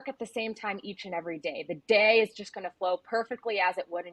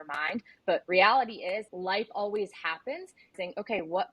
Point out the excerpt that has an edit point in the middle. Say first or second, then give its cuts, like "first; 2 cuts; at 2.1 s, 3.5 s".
second; 3 cuts; at 0.8 s, 1.7 s, 3.3 s